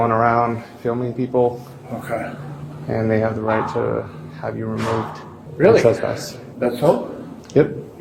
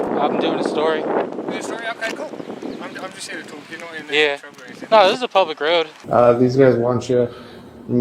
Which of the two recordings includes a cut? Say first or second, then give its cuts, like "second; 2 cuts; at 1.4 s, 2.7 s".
second; 1 cut; at 6.0 s